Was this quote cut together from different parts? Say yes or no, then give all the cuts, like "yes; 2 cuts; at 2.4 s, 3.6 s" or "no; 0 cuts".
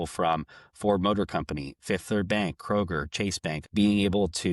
yes; 1 cut; at 3.6 s